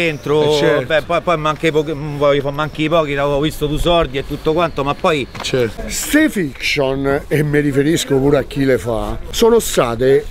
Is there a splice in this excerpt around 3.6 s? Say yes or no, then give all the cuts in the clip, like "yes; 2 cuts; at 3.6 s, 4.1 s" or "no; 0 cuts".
no; 2 cuts; at 5.8 s, 9.2 s